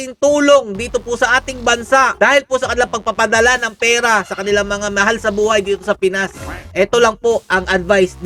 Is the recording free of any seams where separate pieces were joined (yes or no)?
yes